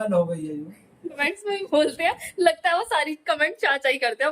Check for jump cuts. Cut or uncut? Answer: cut